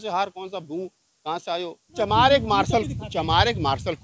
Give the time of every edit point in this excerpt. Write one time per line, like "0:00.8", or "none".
0:01.9